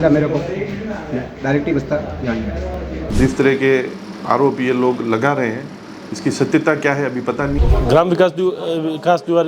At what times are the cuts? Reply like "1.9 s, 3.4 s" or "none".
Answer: 3.1 s, 7.6 s